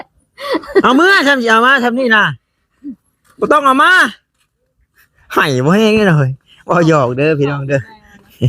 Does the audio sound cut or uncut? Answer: uncut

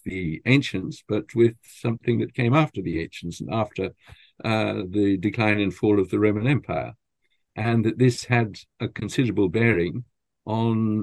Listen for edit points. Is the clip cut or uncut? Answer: uncut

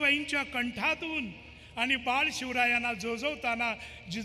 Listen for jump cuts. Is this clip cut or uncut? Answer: uncut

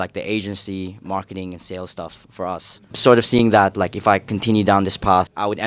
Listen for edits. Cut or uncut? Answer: cut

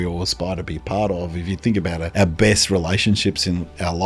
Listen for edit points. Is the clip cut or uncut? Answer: cut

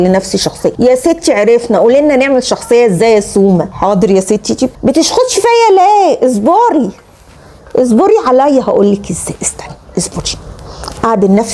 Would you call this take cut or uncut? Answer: uncut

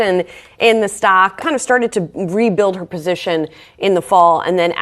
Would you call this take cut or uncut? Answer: cut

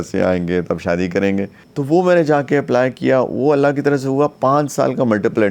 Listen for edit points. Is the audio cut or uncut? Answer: cut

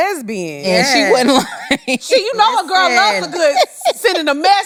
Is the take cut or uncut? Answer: uncut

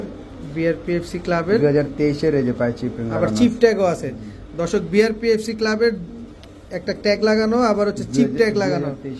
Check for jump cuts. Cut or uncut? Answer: uncut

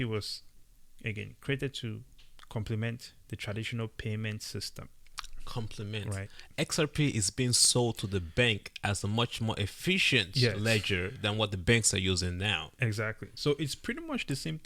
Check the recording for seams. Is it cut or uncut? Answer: uncut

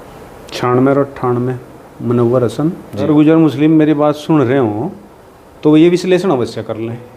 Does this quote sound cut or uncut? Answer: cut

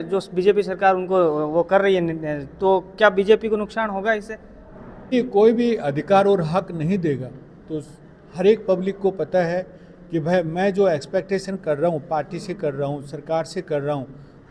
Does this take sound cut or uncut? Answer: uncut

